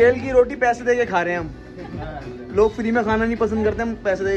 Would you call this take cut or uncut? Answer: uncut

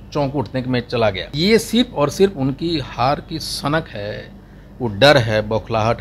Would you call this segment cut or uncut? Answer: cut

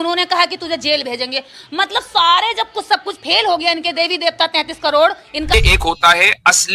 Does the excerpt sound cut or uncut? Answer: cut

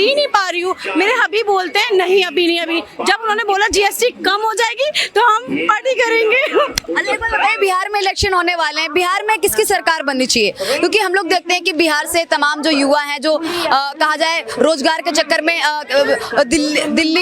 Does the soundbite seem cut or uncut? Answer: uncut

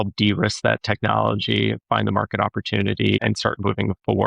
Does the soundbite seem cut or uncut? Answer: cut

